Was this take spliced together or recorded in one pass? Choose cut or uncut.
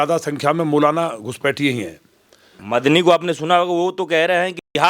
cut